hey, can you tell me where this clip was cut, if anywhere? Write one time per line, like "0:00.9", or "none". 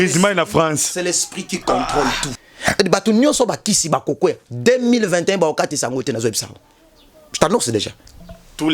0:02.3